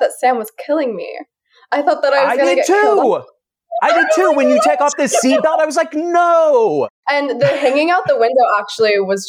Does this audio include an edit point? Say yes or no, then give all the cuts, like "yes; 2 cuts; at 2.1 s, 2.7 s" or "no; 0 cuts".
no; 0 cuts